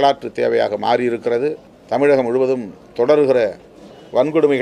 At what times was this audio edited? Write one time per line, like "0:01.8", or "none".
0:01.7